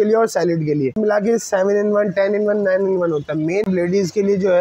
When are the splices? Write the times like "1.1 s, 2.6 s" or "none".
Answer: 0.9 s, 3.7 s

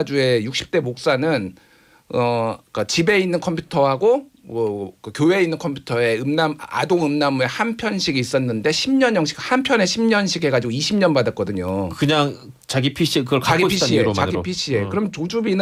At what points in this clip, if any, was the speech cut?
none

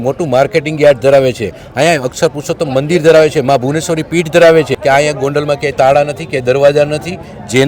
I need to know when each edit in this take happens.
4.7 s

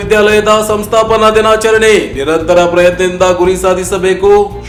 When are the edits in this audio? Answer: none

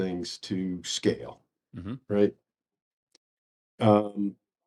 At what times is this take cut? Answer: none

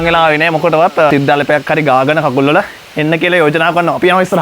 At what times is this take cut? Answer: 1.1 s

